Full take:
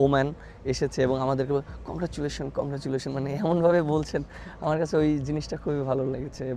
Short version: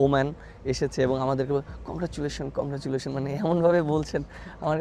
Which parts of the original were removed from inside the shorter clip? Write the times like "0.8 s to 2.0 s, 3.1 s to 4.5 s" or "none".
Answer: none